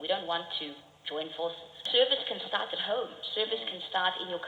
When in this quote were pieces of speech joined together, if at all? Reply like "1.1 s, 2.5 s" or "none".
1.8 s